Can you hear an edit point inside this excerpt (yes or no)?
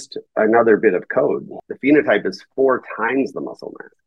yes